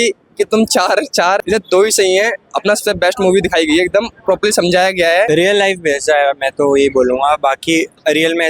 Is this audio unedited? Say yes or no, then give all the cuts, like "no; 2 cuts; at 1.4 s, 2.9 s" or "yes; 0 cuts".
no; 2 cuts; at 1.4 s, 5.3 s